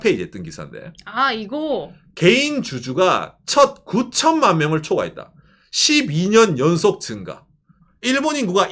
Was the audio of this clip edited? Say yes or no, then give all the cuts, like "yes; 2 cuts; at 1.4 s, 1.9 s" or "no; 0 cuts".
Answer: no; 0 cuts